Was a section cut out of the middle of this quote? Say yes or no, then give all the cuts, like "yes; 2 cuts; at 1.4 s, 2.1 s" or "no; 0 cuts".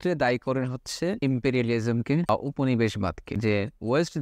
yes; 3 cuts; at 1.2 s, 2.3 s, 3.3 s